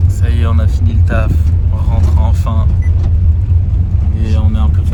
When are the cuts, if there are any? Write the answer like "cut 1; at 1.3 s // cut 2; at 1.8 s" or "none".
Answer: none